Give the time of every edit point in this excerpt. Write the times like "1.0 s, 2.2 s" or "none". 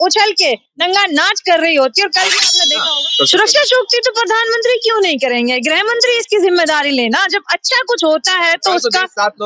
2.5 s